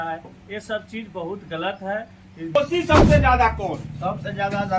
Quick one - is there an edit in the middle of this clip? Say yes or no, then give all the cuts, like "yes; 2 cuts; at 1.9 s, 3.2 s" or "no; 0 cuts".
yes; 1 cut; at 2.5 s